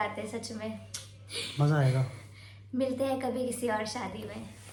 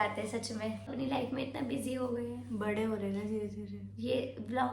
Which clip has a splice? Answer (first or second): second